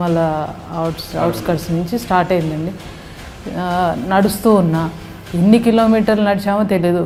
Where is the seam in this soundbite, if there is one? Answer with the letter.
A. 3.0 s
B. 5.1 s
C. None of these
C